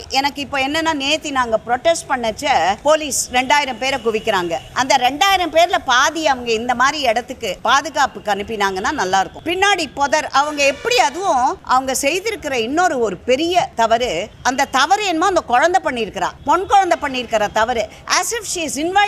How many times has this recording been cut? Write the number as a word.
seven